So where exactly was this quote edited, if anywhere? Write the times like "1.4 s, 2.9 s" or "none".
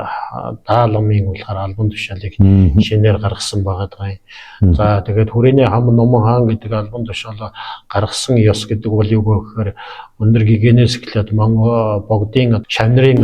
none

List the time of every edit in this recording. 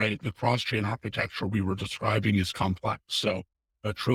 none

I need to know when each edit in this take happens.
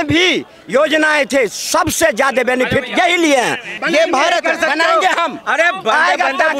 3.8 s

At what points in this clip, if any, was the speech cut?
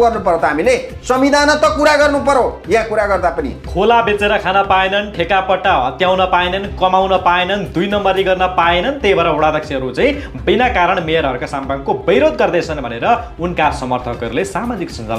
none

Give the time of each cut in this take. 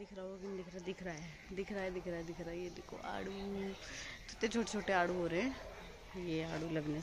none

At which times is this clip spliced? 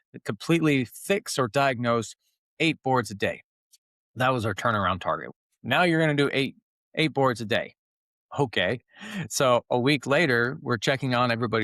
5.4 s

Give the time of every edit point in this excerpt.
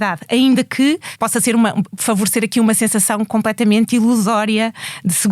1.1 s, 1.9 s

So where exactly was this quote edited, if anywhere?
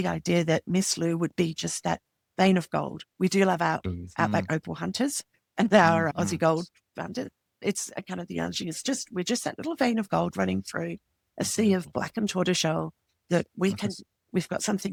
none

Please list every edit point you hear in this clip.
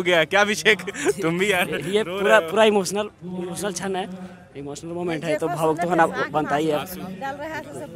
none

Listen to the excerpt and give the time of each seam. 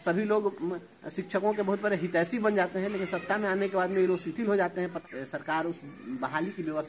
5.0 s

